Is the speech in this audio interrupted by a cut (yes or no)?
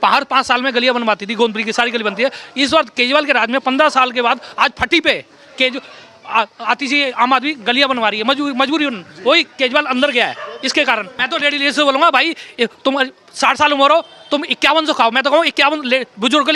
yes